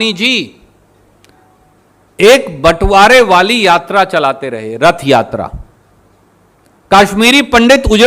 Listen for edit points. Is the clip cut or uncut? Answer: uncut